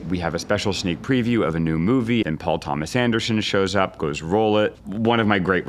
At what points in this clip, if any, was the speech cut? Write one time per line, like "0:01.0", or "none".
0:02.2
0:04.8